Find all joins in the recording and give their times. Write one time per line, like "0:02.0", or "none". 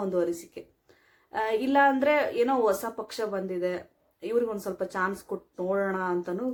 none